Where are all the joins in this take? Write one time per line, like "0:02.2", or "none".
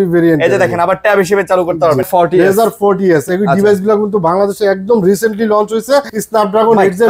0:02.1
0:06.2